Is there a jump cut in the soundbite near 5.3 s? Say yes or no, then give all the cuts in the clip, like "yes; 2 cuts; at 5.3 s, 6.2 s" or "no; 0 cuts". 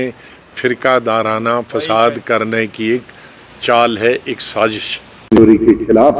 yes; 1 cut; at 5.3 s